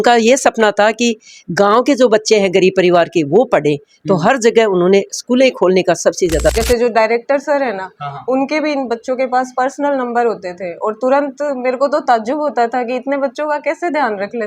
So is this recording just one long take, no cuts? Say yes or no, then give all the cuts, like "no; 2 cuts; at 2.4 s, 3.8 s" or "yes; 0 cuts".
no; 1 cut; at 6.5 s